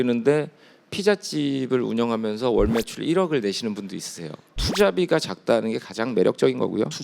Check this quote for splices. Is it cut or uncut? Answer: cut